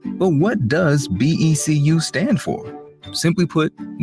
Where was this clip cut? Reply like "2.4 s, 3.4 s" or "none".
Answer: 1.2 s